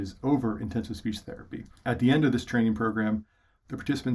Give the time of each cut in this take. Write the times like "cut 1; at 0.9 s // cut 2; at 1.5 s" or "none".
cut 1; at 1.6 s